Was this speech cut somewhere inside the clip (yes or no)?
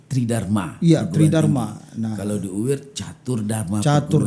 no